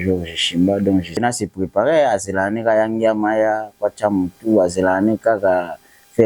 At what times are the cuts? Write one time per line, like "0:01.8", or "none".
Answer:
0:01.1